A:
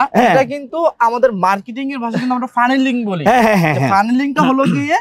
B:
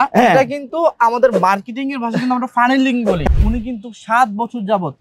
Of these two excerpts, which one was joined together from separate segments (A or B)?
B